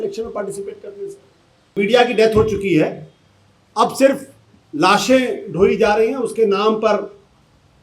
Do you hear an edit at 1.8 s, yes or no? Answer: yes